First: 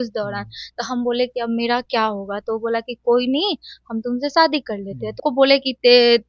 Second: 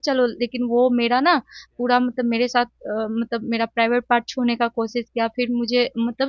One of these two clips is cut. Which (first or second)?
first